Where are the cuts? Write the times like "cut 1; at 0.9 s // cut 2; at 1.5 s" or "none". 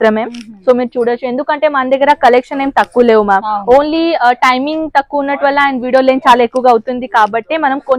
none